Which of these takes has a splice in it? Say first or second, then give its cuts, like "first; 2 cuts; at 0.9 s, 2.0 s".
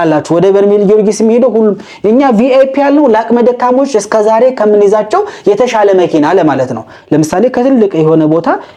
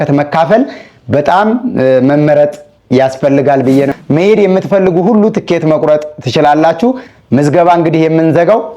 second; 1 cut; at 3.9 s